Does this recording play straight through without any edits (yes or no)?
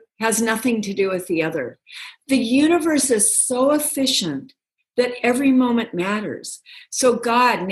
yes